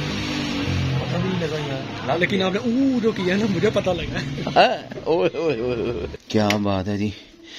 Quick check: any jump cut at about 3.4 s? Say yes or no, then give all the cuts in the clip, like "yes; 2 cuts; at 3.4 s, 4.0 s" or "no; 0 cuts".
no; 1 cut; at 6.2 s